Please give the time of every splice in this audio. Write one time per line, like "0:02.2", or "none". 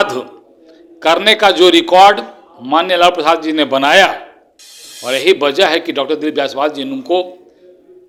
none